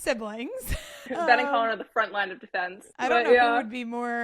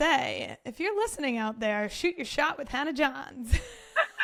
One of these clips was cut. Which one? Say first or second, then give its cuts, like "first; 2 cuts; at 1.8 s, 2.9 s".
first; 2 cuts; at 1.0 s, 2.9 s